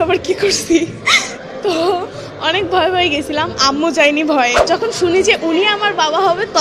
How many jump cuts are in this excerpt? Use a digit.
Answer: 1